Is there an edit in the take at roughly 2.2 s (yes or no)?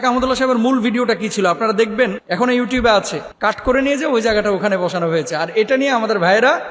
yes